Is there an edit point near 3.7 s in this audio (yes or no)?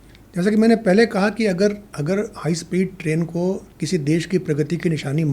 yes